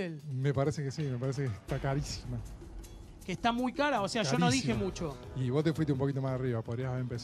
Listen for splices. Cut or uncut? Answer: uncut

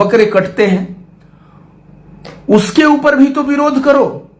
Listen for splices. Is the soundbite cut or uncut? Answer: uncut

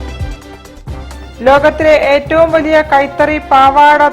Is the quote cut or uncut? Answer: uncut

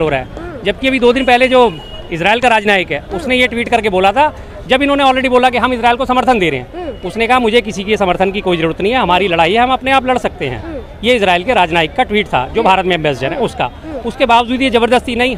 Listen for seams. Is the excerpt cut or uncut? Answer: uncut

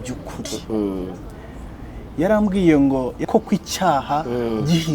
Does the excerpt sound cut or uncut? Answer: cut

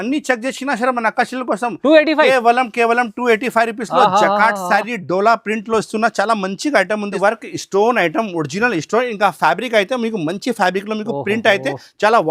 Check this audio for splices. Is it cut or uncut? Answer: cut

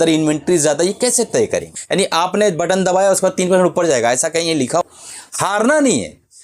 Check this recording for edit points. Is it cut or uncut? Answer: cut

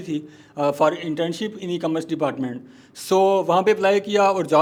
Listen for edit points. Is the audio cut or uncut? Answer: uncut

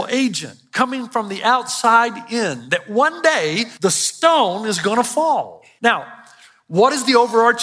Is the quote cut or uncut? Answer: cut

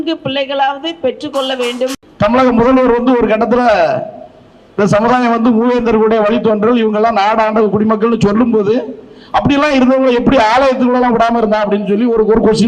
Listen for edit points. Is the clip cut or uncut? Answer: cut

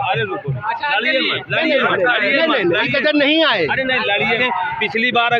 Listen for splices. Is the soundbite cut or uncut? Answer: cut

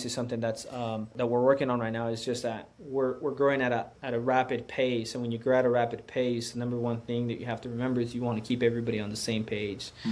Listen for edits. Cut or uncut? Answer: cut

